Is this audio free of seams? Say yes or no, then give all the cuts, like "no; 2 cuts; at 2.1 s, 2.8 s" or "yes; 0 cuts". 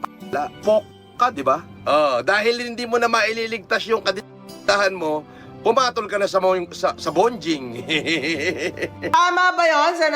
no; 1 cut; at 9.1 s